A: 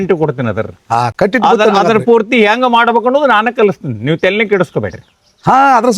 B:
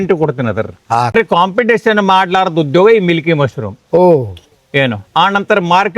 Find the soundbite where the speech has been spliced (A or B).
B